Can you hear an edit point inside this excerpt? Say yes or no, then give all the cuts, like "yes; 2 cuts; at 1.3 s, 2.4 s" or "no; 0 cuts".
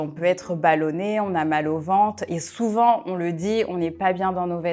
no; 0 cuts